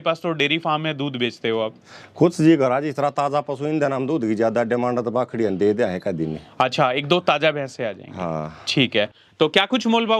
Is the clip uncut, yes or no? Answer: no